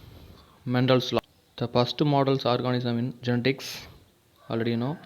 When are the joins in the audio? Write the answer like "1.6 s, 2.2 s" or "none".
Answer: 1.2 s